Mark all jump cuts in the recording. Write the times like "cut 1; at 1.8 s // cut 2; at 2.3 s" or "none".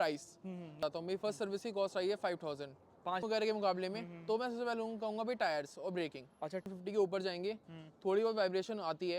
cut 1; at 0.8 s // cut 2; at 3.2 s // cut 3; at 6.7 s